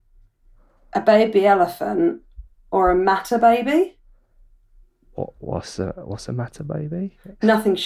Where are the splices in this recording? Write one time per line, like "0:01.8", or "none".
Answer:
none